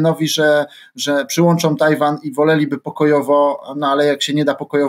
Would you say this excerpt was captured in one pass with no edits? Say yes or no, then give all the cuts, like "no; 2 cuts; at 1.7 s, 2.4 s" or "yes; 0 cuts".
yes; 0 cuts